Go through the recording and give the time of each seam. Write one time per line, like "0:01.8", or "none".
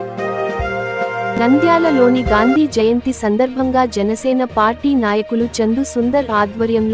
none